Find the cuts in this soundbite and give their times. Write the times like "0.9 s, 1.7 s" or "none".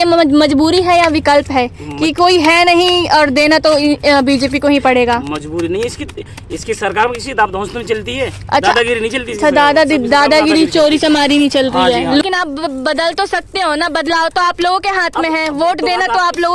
12.2 s